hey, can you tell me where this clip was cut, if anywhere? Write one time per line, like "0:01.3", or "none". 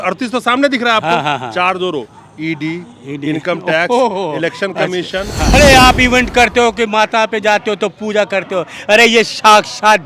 0:05.5